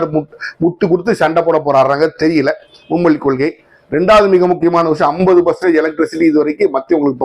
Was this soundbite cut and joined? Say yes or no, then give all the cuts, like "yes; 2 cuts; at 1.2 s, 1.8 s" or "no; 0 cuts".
no; 0 cuts